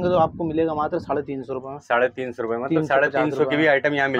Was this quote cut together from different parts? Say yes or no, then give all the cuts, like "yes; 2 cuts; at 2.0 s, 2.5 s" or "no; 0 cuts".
no; 0 cuts